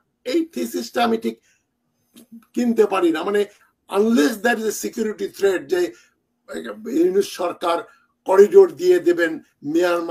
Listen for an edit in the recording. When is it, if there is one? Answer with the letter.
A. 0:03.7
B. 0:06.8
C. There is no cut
C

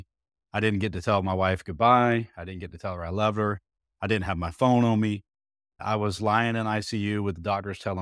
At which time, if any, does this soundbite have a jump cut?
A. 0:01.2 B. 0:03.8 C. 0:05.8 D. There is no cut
C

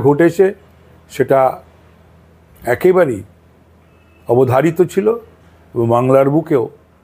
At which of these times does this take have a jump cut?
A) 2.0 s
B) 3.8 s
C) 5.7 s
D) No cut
D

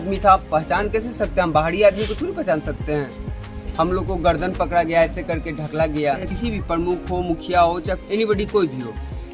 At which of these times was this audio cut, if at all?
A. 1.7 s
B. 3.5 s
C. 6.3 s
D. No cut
C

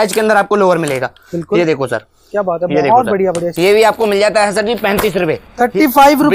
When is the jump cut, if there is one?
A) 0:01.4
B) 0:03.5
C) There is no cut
B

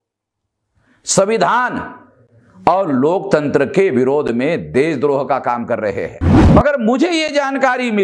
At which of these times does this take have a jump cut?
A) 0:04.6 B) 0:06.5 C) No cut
B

